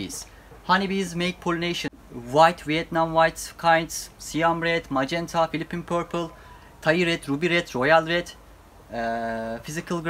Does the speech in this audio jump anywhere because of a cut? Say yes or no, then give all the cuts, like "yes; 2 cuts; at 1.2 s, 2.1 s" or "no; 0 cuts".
yes; 1 cut; at 1.8 s